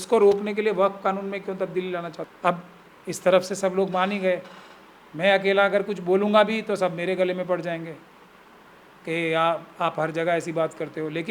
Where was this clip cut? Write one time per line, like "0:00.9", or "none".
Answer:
0:02.2